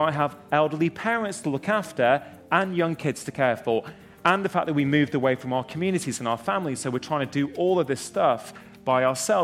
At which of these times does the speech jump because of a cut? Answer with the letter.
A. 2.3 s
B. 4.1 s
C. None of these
C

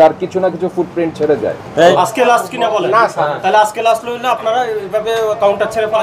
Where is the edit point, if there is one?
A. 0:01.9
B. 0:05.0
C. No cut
A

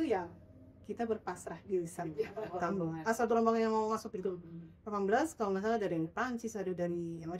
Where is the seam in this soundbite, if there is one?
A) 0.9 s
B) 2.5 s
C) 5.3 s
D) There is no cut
B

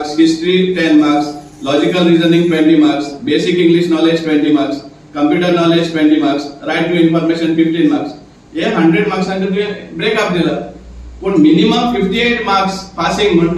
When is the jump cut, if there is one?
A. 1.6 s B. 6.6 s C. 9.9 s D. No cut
D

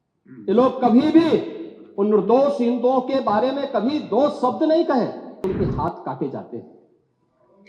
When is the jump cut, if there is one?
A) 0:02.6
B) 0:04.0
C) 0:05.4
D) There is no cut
C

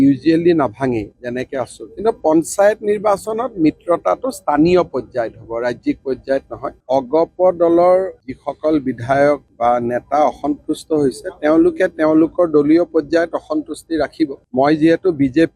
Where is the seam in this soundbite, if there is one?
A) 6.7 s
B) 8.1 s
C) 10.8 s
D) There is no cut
A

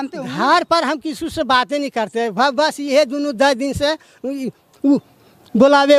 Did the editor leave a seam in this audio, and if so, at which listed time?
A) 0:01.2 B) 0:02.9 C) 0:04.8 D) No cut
D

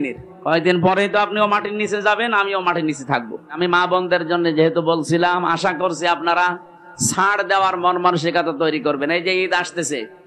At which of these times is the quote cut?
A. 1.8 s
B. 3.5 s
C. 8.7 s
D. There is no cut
B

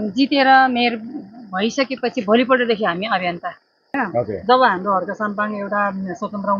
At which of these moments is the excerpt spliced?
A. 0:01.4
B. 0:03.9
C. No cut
B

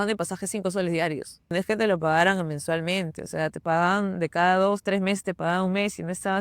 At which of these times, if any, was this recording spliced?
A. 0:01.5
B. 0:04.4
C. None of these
A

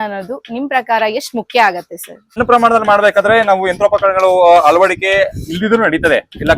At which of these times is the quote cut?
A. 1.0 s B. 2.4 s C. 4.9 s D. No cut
B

